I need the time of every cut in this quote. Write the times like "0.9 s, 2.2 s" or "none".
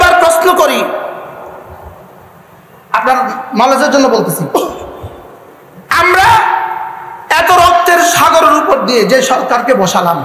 none